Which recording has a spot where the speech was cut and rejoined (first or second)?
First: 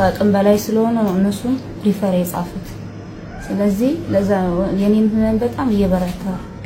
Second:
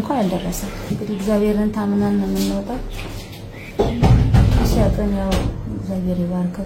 second